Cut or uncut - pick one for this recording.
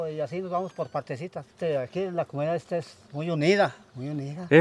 cut